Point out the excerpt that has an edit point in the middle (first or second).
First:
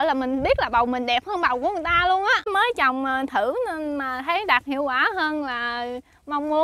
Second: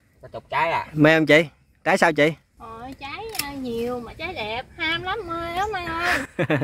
first